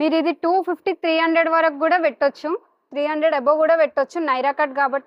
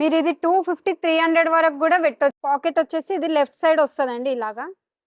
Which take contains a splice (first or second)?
second